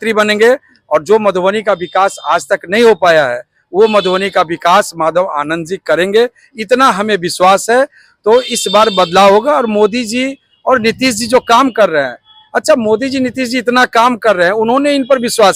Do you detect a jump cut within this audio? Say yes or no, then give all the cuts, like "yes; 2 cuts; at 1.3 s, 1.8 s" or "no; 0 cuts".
no; 0 cuts